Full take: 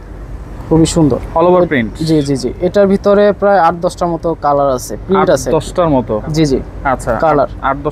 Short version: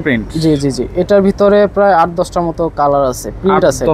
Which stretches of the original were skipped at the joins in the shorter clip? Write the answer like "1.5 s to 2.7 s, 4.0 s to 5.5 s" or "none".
none